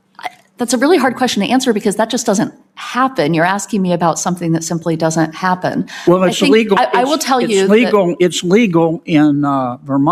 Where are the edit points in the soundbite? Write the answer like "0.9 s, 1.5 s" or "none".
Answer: none